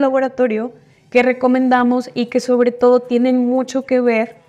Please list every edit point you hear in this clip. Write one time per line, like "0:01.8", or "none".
none